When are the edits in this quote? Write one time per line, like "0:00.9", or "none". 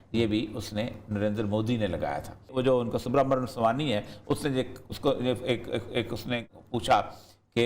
0:02.4

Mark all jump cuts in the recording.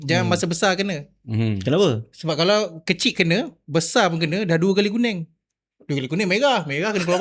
none

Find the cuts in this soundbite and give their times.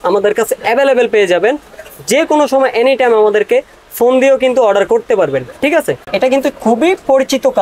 0:06.0

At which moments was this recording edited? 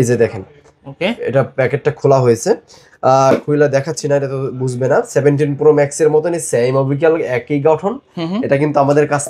none

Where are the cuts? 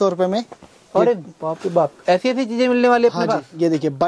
none

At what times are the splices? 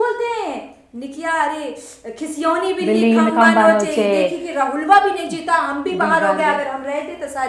none

